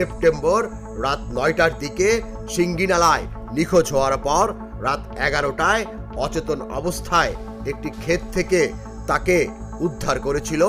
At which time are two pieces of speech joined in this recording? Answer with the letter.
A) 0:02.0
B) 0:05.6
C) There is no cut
C